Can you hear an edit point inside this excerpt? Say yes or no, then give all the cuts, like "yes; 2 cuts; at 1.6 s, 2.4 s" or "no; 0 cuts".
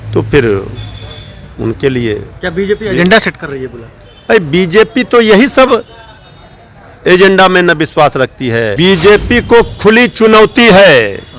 yes; 1 cut; at 8.7 s